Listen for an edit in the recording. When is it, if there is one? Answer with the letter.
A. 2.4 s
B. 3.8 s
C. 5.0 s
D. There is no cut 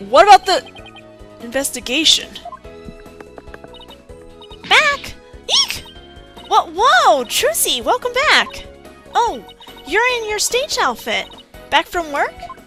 D